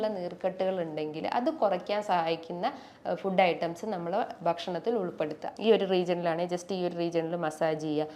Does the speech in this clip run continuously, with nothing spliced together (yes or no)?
no